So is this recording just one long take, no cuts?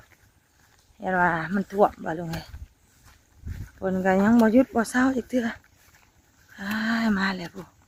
yes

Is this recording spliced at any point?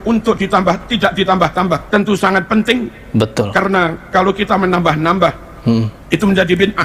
yes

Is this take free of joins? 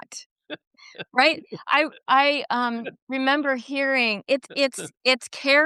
yes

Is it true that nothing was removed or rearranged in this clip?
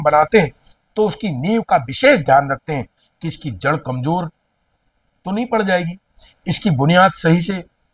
yes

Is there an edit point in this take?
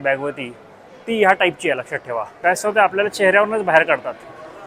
yes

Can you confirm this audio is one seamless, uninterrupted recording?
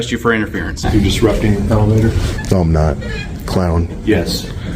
no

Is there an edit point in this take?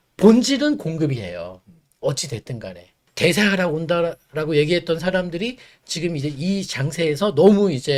no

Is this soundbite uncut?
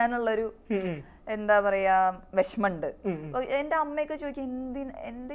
yes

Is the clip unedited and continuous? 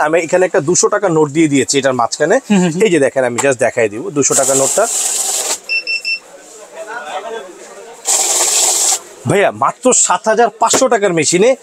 yes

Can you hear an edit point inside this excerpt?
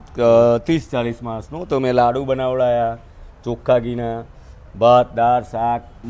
no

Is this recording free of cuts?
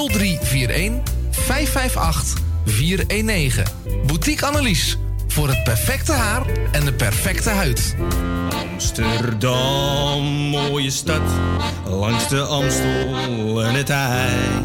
no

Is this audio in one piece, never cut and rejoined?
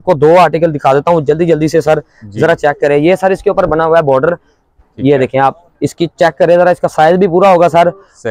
yes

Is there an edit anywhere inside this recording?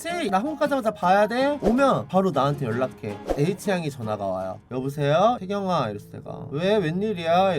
yes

